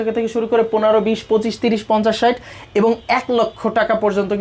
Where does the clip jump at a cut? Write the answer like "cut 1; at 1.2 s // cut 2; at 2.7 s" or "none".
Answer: none